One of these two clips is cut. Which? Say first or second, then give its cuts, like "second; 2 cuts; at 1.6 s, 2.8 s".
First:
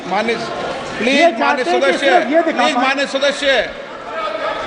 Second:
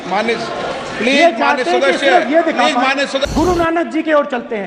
second; 1 cut; at 3.2 s